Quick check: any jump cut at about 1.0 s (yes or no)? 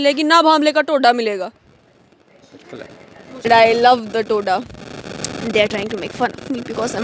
no